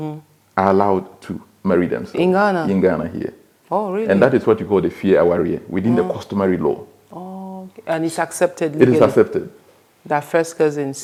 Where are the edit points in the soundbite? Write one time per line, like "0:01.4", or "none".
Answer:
none